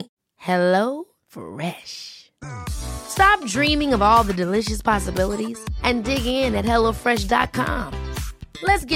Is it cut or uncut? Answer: uncut